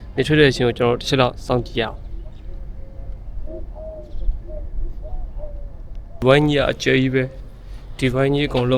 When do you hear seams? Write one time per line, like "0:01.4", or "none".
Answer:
0:06.2